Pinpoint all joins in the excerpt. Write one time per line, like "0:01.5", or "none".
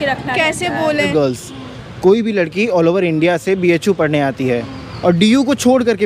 0:01.1

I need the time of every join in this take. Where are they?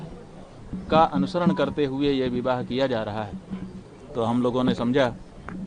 none

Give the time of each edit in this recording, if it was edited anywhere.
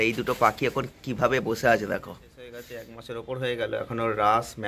0:02.6

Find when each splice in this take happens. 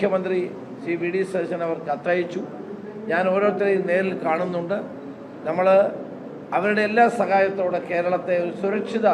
none

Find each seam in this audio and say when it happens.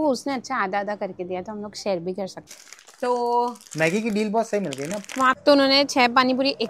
0:02.5
0:05.4

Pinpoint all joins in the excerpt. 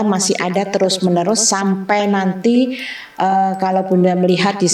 none

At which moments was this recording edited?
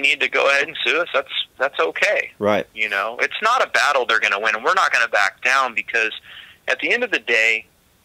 none

